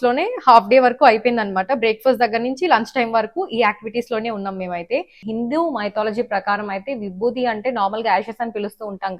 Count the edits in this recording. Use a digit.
1